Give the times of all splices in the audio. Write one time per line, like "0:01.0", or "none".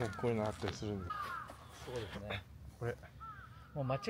0:01.1